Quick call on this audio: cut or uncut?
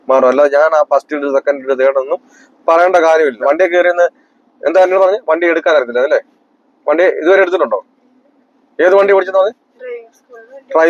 cut